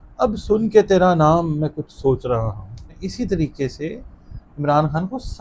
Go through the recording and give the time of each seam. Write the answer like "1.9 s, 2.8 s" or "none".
3.0 s